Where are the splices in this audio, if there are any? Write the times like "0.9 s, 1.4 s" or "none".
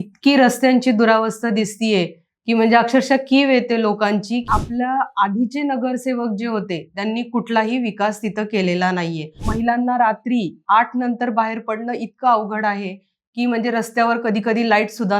4.5 s, 9.5 s